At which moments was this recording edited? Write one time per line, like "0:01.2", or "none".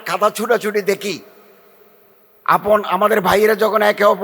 none